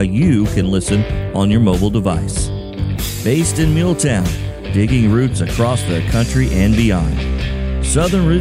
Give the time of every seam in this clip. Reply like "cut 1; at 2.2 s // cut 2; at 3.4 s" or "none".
none